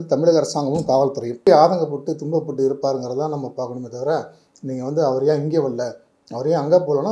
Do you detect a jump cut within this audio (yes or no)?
yes